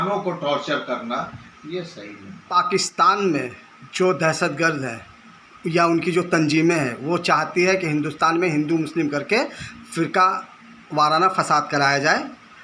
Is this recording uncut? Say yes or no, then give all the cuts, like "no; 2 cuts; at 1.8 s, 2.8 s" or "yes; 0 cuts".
no; 1 cut; at 2.5 s